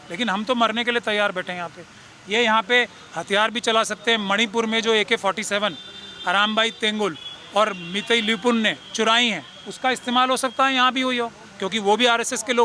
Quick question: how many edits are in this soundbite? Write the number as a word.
zero